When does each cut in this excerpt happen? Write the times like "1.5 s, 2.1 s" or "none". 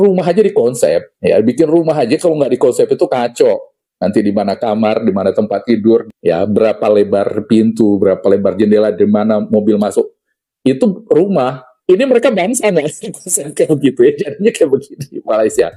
none